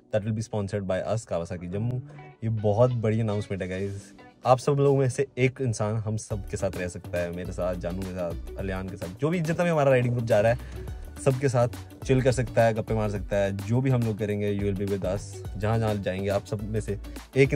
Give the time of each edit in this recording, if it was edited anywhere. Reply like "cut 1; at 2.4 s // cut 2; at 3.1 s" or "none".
none